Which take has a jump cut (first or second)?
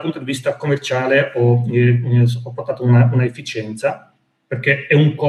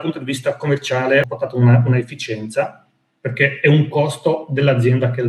second